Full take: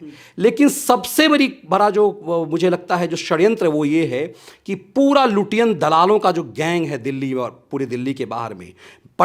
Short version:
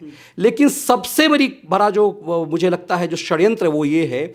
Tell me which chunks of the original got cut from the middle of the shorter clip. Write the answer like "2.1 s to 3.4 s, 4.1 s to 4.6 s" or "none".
none